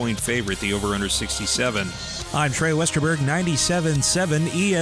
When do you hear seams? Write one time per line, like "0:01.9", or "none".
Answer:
0:02.1